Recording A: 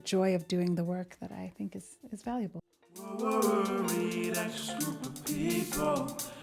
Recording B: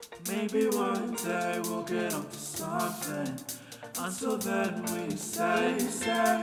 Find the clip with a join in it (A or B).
A